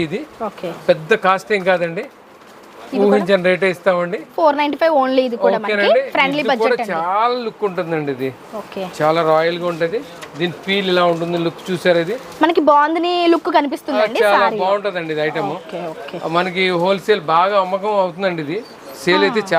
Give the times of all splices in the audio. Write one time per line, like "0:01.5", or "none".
none